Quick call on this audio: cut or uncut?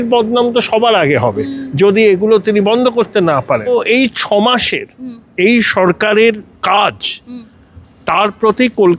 cut